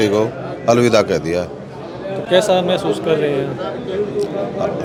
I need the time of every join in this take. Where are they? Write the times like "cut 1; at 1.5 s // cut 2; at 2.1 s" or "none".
none